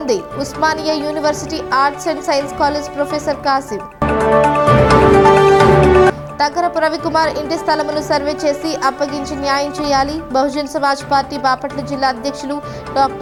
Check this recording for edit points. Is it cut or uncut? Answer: uncut